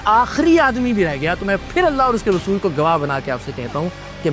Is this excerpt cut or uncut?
uncut